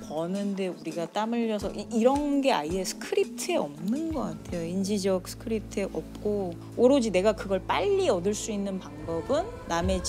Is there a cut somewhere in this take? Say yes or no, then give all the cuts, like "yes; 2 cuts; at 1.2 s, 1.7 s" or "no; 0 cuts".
no; 0 cuts